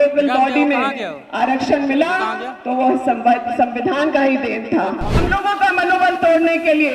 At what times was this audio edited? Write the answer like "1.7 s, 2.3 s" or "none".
5.2 s